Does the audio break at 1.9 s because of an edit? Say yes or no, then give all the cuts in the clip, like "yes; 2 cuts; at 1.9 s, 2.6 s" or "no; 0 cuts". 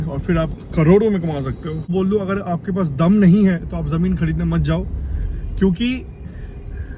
yes; 1 cut; at 1.9 s